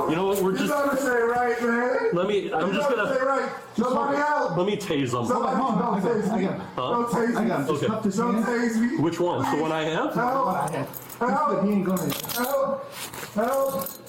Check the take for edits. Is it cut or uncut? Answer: uncut